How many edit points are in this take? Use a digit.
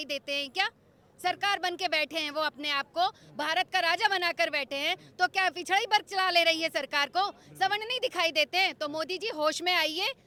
0